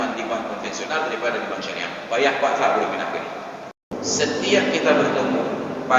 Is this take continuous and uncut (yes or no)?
no